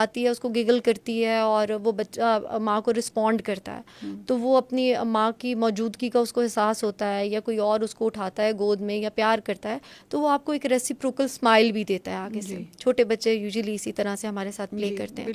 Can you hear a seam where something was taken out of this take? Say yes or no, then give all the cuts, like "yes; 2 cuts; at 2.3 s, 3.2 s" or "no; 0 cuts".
no; 0 cuts